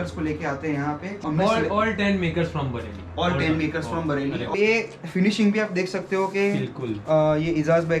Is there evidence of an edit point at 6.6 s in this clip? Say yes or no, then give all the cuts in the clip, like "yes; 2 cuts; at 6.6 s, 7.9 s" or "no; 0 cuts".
no; 2 cuts; at 1.1 s, 4.5 s